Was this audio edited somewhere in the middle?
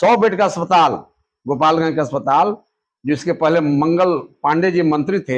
no; 0 cuts

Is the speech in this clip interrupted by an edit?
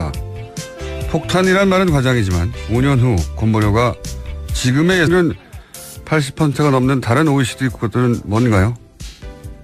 no; 0 cuts

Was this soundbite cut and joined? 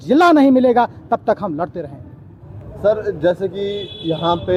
no; 0 cuts

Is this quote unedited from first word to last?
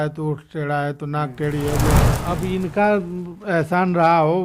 no; 1 cut; at 2.1 s

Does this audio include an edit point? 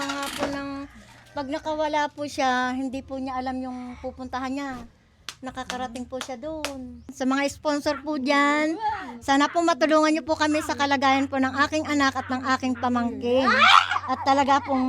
yes; 1 cut; at 7.0 s

